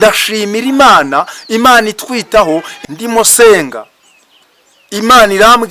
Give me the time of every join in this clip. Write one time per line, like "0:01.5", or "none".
0:02.7